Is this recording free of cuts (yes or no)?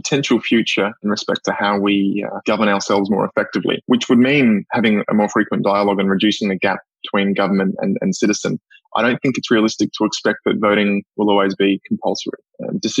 no